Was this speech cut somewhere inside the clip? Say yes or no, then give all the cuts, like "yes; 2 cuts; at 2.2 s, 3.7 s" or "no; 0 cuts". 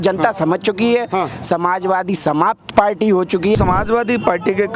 yes; 1 cut; at 3.6 s